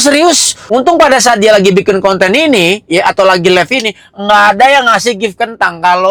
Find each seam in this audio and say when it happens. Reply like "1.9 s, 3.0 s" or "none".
none